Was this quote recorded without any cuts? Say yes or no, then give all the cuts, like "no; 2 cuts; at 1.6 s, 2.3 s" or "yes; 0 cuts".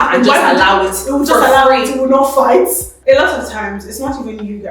no; 1 cut; at 2.8 s